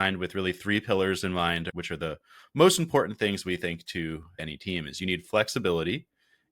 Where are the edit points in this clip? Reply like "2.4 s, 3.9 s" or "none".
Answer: 1.7 s, 4.4 s